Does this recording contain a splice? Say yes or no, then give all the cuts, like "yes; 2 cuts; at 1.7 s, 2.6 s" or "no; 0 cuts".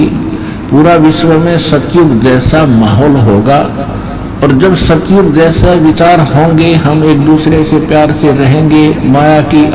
no; 0 cuts